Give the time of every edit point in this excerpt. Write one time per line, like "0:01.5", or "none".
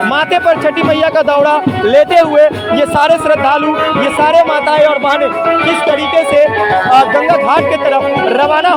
none